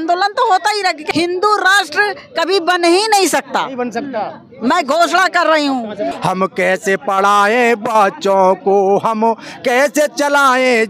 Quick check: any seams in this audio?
yes; 2 cuts; at 1.0 s, 6.1 s

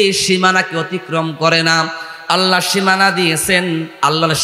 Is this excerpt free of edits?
yes; 0 cuts

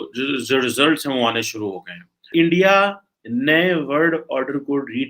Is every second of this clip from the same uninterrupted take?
no; 1 cut; at 2.3 s

